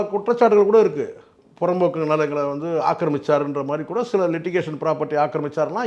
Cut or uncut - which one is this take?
uncut